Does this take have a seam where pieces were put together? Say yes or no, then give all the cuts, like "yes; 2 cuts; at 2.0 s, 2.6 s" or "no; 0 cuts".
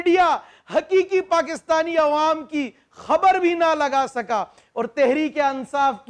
no; 0 cuts